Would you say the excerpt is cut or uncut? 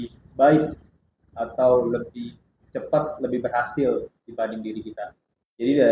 uncut